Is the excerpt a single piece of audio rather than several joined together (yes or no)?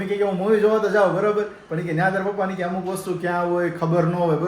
yes